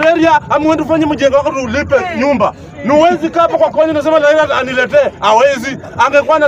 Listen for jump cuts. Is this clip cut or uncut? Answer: uncut